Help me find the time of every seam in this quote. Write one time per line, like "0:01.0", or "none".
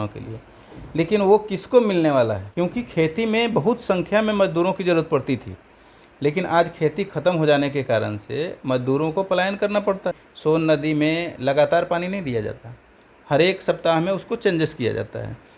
0:02.4
0:10.2